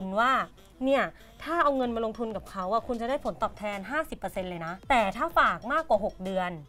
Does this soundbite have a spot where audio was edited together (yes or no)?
yes